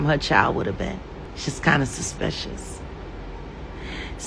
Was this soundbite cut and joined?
no; 0 cuts

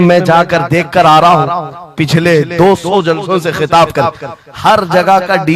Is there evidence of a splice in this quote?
no; 0 cuts

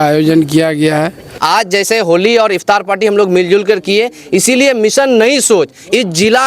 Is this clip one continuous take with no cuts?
no; 1 cut; at 1.3 s

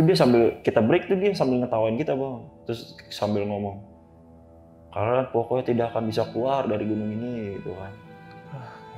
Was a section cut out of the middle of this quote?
no; 0 cuts

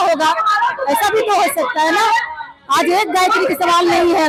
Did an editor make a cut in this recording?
no; 0 cuts

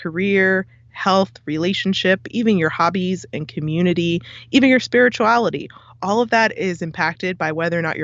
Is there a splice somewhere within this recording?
no; 0 cuts

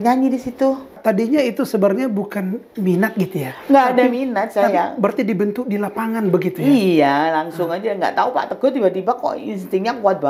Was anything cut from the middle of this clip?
yes; 1 cut; at 1.0 s

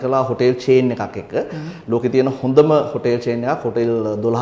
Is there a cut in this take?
no; 0 cuts

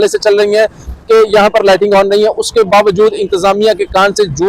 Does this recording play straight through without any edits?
yes; 0 cuts

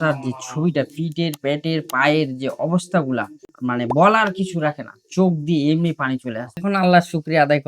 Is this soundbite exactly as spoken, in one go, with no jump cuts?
no; 1 cut; at 6.6 s

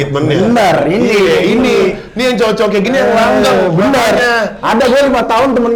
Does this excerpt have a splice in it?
no; 0 cuts

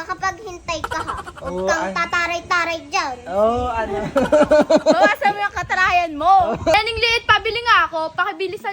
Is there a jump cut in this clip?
yes; 1 cut; at 6.7 s

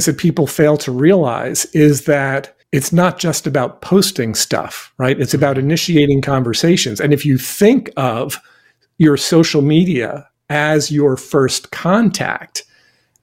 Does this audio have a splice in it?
yes; 1 cut; at 2.5 s

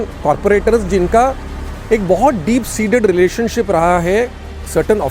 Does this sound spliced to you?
no; 0 cuts

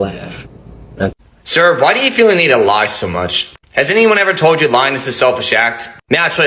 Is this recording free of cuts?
no; 1 cut; at 1.1 s

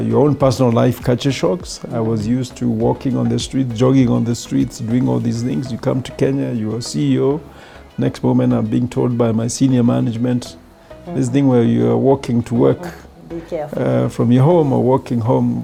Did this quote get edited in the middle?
no; 0 cuts

